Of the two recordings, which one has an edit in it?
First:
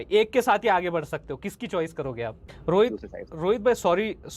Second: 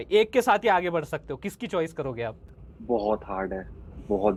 first; 1 cut; at 2.5 s

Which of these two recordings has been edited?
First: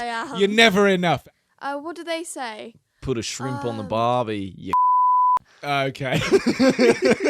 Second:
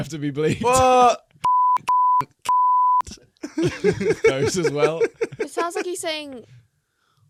first; 1 cut; at 1.2 s

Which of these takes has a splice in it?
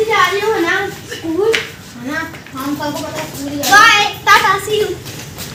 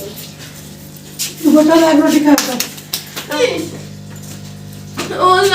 second; 1 cut; at 3.4 s

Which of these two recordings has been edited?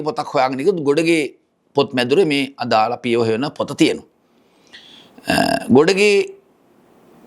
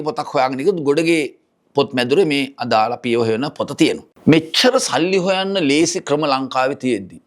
second; 1 cut; at 4.1 s

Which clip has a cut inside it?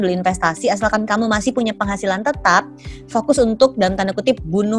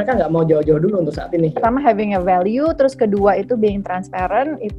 second; 1 cut; at 1.6 s

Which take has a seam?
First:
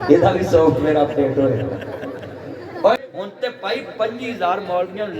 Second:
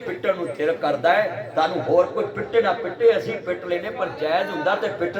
first; 1 cut; at 3.0 s

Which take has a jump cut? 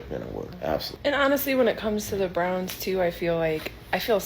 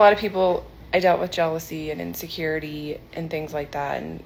first; 1 cut; at 0.9 s

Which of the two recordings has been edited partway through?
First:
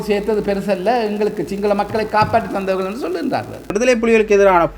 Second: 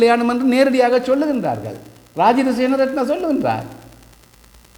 first; 1 cut; at 3.7 s

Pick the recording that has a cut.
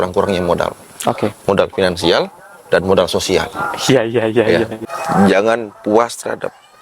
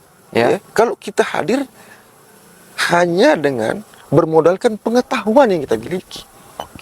first; 1 cut; at 4.8 s

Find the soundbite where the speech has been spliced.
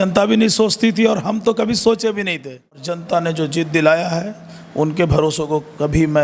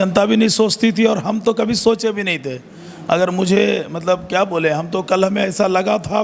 first; 1 cut; at 2.9 s

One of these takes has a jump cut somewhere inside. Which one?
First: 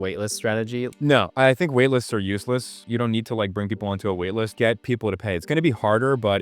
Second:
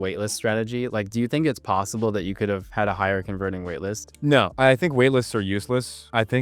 first; 3 cuts; at 0.9 s, 2.8 s, 4.5 s

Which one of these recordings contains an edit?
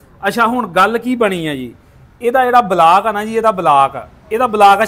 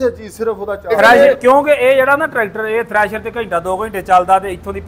second; 1 cut; at 0.9 s

